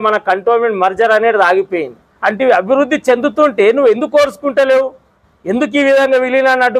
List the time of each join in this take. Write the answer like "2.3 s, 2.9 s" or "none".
2.1 s